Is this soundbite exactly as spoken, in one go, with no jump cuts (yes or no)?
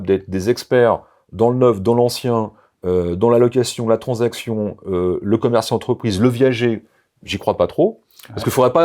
yes